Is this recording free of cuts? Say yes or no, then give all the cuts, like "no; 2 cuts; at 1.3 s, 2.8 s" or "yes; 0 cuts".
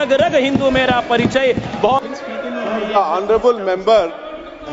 yes; 0 cuts